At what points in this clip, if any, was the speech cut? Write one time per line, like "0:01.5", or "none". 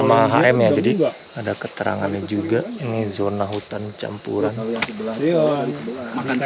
0:01.3